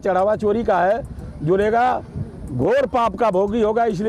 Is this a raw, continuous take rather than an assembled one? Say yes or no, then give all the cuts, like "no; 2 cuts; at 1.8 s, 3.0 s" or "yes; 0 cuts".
yes; 0 cuts